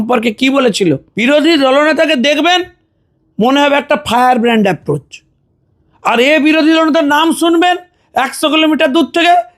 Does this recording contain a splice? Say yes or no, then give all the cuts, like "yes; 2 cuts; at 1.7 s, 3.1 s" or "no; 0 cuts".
yes; 1 cut; at 1.1 s